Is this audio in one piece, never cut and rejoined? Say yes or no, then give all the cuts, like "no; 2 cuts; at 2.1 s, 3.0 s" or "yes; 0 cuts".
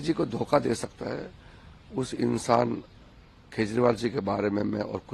yes; 0 cuts